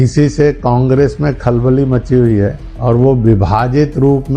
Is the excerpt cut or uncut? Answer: cut